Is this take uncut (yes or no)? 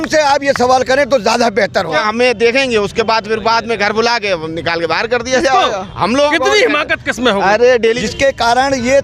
no